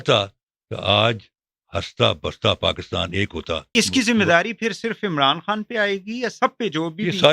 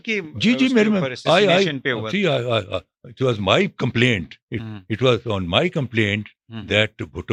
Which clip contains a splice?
first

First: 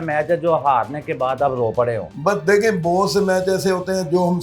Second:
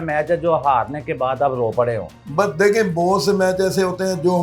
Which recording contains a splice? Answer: first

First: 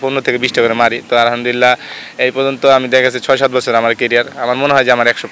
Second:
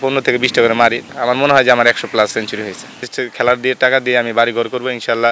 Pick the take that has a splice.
second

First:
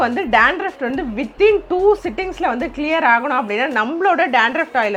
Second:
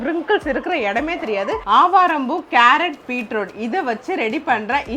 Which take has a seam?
second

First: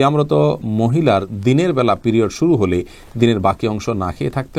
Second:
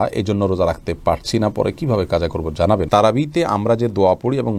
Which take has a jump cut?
second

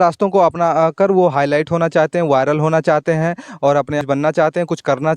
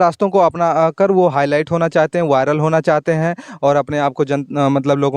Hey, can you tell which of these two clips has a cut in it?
first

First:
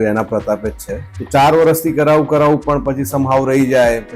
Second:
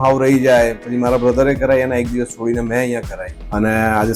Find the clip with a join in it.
first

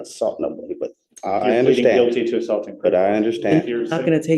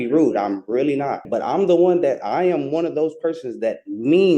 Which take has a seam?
second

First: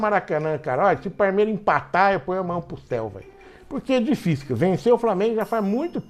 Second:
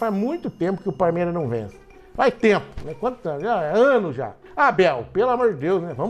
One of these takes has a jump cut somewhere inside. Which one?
second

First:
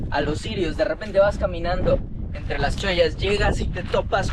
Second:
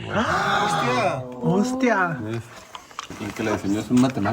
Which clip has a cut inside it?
second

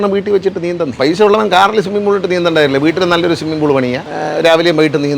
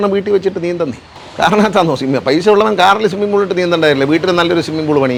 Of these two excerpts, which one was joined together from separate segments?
first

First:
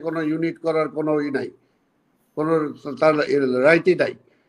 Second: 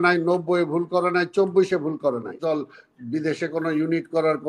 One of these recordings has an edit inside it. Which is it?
second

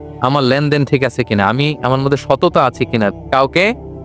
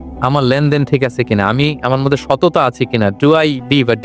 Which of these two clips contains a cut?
first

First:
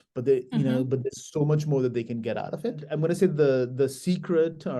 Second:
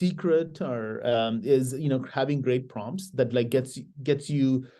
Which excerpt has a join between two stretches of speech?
first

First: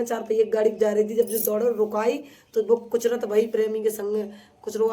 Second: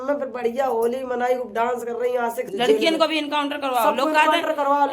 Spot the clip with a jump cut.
second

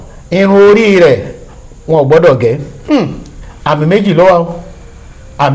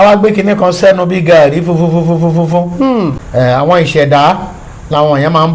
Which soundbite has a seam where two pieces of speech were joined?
second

